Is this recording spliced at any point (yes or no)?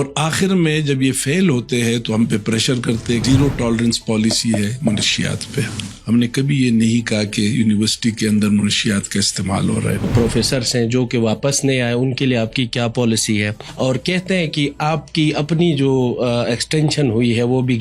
yes